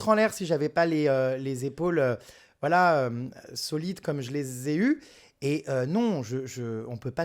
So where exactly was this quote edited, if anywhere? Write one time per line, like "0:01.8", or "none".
none